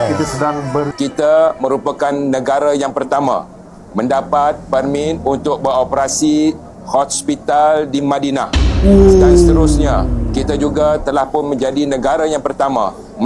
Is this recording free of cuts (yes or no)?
no